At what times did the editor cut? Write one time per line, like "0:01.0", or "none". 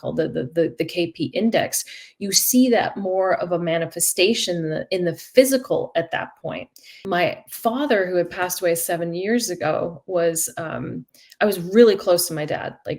0:06.9